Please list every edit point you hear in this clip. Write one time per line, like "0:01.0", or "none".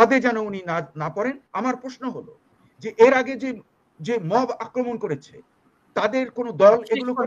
0:01.4